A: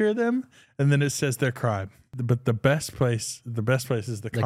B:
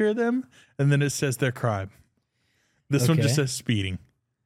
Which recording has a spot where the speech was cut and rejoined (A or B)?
A